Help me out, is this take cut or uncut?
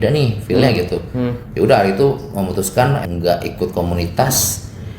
cut